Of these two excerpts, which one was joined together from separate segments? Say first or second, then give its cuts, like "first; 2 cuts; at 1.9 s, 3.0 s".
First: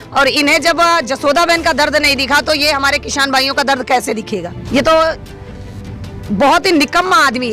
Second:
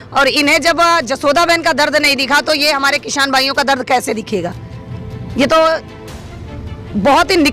first; 1 cut; at 4.5 s